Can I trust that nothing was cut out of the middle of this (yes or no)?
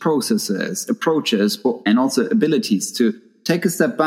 yes